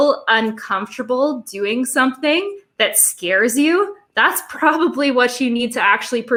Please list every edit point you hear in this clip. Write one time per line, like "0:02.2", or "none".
none